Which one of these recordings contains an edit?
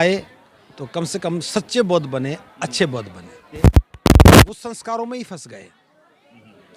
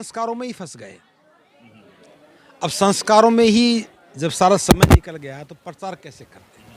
first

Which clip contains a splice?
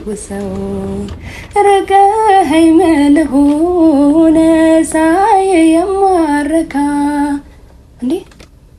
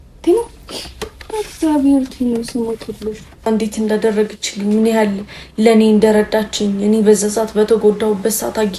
second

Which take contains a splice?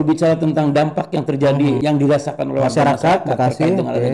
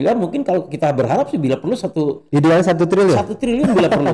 first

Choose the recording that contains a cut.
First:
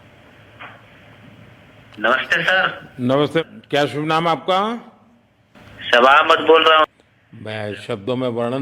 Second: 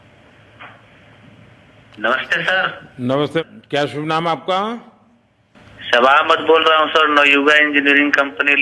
first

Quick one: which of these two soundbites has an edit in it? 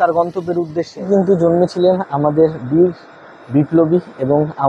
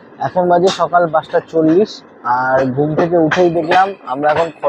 first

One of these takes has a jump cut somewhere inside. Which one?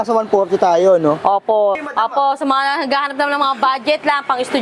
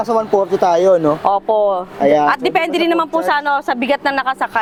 first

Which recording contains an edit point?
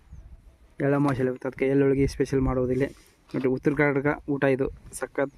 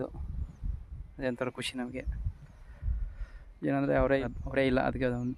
second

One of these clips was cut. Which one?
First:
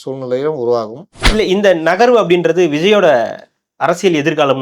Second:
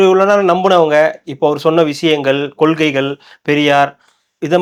first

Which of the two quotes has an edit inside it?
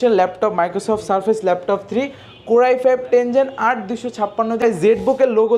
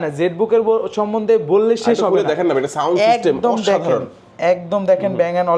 first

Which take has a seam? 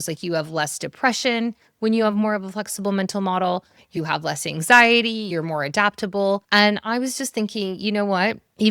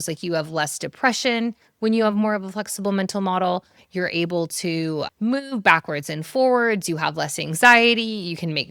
first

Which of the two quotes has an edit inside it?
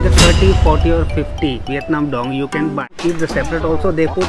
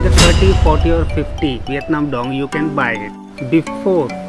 first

